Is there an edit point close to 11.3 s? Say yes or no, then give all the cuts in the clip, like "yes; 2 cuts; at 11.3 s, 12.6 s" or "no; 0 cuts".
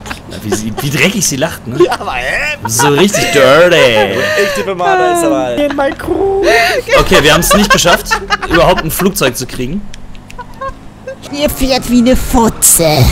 yes; 2 cuts; at 5.6 s, 11.3 s